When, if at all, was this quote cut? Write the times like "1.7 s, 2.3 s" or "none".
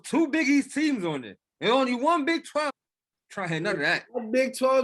2.7 s